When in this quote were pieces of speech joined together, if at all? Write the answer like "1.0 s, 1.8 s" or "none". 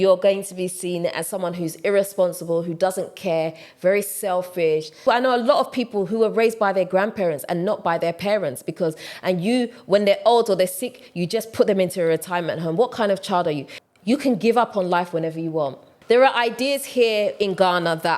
5.0 s, 9.1 s, 13.7 s, 15.9 s